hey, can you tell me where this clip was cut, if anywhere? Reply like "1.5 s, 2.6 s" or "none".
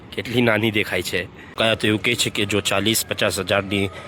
1.6 s